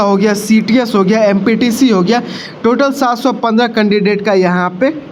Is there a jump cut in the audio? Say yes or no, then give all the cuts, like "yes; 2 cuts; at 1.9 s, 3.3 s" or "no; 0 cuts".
no; 0 cuts